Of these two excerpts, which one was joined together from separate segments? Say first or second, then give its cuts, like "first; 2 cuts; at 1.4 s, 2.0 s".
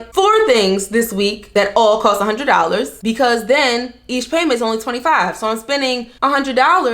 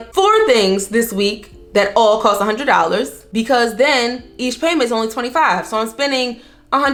first; 3 cuts; at 1.4 s, 2.9 s, 6.1 s